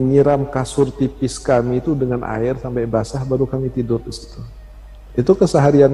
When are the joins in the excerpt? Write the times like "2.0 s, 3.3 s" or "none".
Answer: none